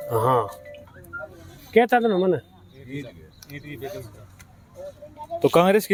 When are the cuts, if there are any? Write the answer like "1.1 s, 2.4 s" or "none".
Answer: none

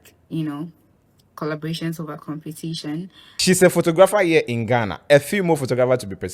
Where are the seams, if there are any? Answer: 3.4 s

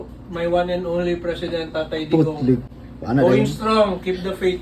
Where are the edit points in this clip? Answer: 2.7 s

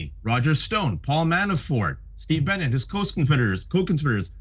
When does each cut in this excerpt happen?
none

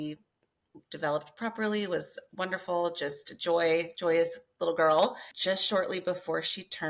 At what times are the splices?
5.3 s

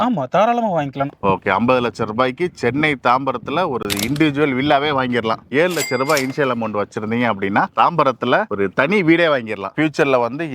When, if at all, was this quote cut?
1.1 s, 5.4 s, 9.6 s

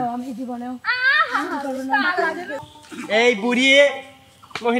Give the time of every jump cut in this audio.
2.6 s

